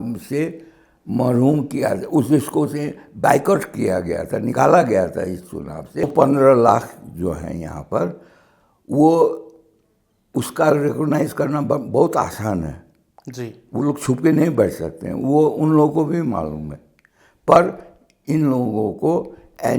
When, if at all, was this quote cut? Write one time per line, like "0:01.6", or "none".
0:05.8